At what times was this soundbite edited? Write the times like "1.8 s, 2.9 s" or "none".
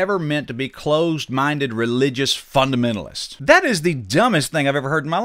3.3 s